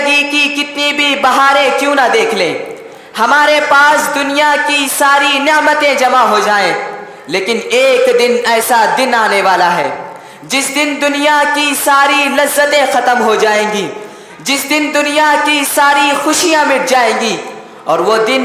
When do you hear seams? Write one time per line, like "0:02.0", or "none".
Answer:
none